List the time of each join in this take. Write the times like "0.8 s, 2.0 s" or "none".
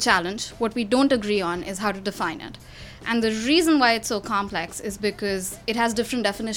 none